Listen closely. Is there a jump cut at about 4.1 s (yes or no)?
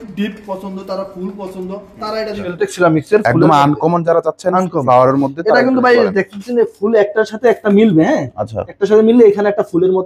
no